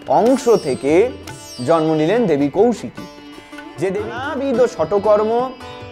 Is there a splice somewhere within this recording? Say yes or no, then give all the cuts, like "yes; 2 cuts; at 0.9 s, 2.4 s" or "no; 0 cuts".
yes; 1 cut; at 4.3 s